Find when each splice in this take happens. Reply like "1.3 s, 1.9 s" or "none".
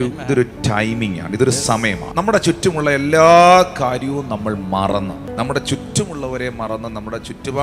2.0 s, 5.3 s